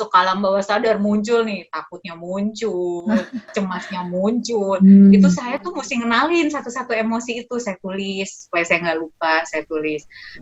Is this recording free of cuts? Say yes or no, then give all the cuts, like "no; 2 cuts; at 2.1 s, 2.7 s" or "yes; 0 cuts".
yes; 0 cuts